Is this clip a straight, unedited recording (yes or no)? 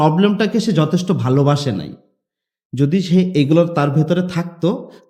yes